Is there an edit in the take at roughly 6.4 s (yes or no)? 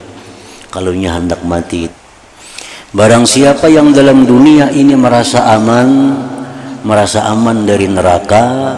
no